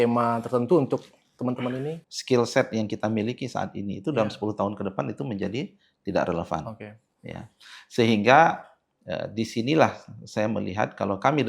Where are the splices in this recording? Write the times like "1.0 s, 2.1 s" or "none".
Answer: 2.0 s